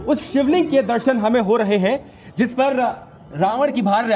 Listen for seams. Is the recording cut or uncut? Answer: uncut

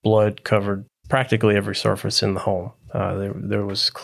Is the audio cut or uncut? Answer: cut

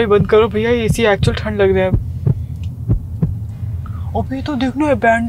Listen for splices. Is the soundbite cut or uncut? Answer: uncut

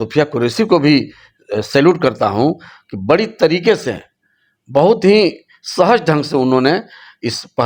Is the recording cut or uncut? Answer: uncut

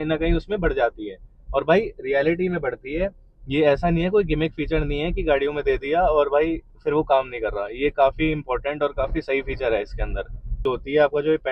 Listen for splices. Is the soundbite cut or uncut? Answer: cut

